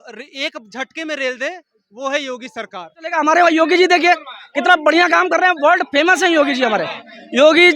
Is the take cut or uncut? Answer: cut